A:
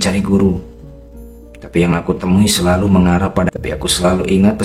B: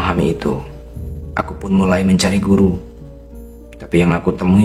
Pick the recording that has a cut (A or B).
A